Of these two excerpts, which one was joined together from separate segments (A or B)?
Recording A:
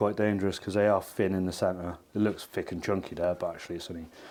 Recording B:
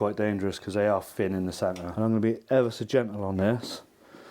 B